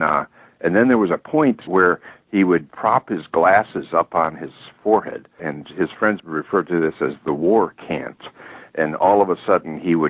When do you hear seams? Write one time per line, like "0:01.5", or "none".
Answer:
0:01.7
0:02.7
0:06.2